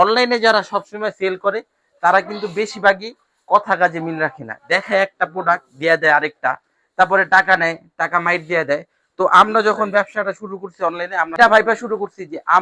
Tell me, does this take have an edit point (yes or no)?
yes